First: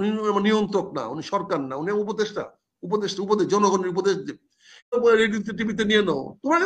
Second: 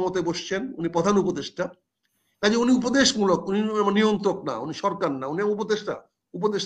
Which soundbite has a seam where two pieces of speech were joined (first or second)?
first